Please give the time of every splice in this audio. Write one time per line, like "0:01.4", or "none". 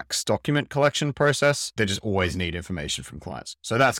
0:01.7